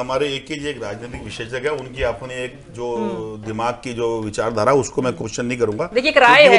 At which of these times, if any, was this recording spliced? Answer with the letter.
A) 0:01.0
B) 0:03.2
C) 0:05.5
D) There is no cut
D